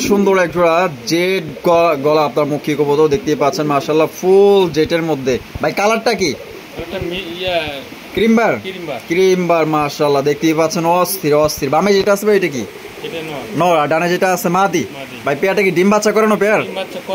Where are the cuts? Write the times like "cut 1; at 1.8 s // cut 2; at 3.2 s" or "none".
none